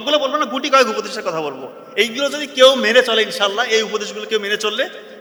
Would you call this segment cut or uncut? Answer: uncut